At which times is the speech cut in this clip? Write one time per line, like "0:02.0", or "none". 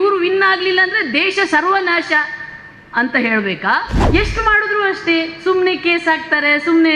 0:04.0

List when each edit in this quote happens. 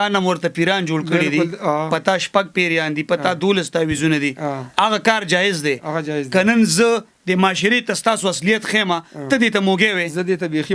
none

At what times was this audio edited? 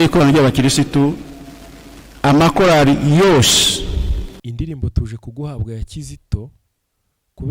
0:04.3

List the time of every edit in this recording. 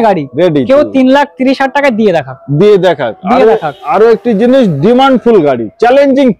none

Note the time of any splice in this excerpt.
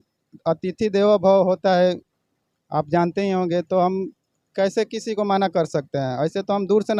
none

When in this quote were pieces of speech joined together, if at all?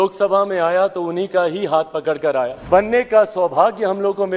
0:02.6

